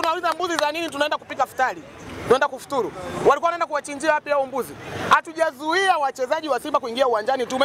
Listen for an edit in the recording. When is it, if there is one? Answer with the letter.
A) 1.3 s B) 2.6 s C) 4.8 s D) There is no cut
D